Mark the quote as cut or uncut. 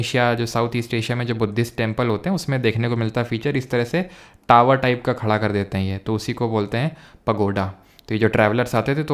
uncut